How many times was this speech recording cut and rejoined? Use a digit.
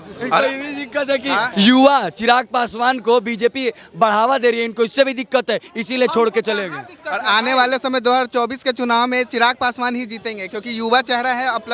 0